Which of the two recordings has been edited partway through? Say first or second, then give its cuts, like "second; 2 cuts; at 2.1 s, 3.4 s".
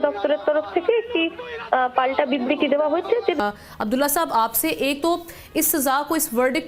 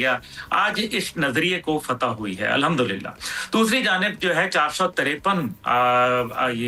first; 1 cut; at 3.4 s